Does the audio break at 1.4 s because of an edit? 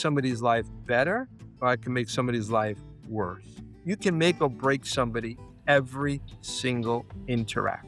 yes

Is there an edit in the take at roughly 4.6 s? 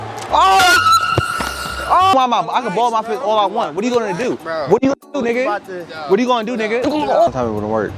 no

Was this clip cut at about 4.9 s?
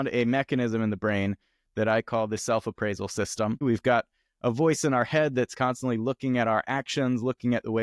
no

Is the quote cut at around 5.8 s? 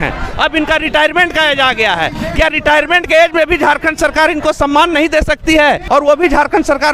yes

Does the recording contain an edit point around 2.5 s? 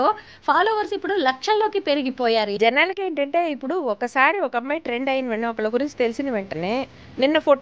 yes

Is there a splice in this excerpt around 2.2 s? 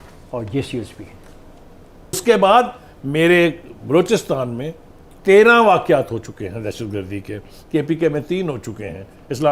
yes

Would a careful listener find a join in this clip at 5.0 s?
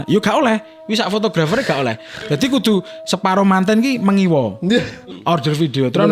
yes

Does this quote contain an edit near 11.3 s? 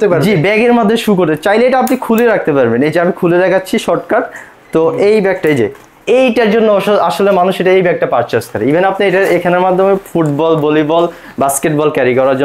no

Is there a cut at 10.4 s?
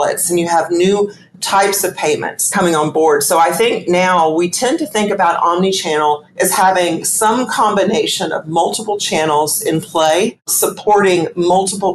yes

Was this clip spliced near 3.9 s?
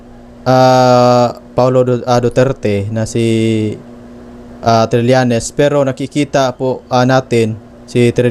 no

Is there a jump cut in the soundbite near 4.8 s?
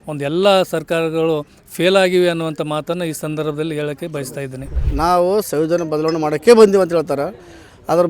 yes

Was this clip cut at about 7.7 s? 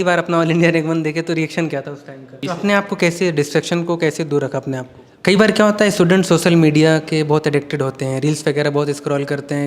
no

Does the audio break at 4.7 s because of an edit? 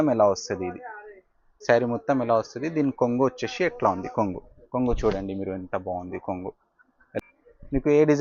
no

